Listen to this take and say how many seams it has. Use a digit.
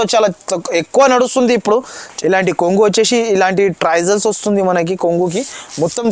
1